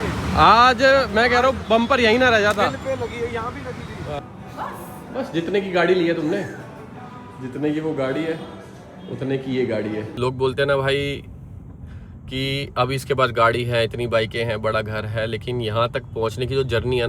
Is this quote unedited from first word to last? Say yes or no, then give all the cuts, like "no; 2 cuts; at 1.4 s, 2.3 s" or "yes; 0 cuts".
no; 2 cuts; at 4.2 s, 10.1 s